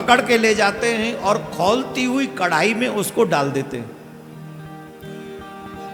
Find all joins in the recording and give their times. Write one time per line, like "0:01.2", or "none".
none